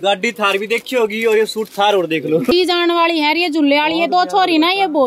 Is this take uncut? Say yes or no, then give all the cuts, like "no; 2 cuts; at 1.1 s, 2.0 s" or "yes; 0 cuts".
no; 1 cut; at 2.5 s